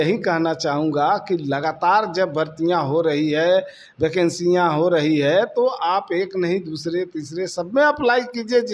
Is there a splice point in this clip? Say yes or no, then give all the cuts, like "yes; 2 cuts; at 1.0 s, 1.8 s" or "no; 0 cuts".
no; 0 cuts